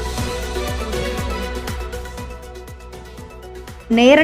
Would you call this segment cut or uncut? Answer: cut